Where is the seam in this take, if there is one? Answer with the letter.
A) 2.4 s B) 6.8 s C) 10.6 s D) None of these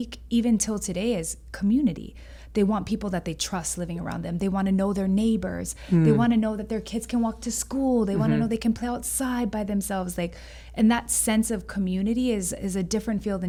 D